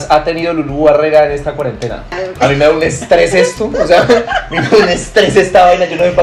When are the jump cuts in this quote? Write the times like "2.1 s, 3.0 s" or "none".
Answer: 2.2 s